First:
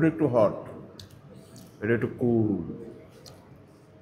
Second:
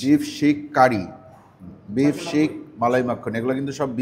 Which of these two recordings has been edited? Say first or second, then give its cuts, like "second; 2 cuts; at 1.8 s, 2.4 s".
second; 1 cut; at 1.6 s